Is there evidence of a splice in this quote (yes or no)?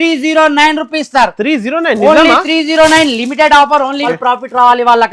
yes